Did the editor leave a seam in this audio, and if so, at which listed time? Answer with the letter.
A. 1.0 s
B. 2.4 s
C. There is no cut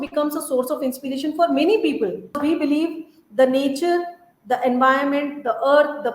B